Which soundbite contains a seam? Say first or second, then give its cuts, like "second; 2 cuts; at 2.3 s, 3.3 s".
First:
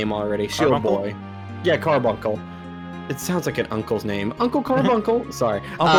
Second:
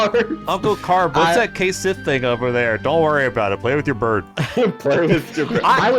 second; 1 cut; at 4.4 s